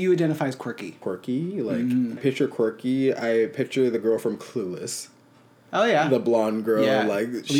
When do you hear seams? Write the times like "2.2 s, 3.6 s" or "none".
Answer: 0.9 s, 2.2 s